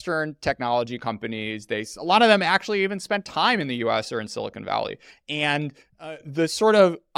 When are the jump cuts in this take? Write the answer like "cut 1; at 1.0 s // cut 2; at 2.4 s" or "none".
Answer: none